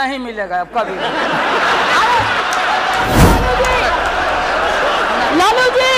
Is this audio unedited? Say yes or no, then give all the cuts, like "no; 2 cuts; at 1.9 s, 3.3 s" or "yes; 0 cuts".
no; 1 cut; at 3.2 s